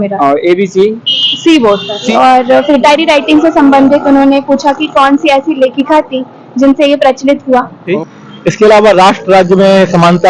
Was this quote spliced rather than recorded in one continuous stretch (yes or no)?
yes